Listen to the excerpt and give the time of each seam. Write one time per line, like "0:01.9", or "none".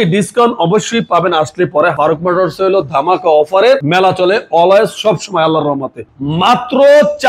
0:01.9
0:03.9
0:06.2